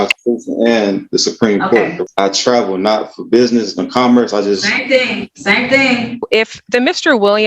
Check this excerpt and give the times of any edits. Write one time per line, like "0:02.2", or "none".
0:02.0
0:06.3